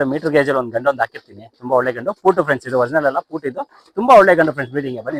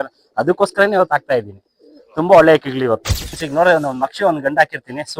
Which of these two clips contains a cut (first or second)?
second